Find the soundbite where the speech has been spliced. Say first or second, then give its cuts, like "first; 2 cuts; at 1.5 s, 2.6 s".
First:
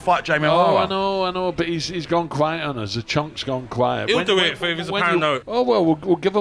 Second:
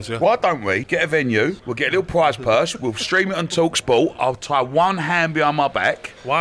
second; 2 cuts; at 0.8 s, 1.6 s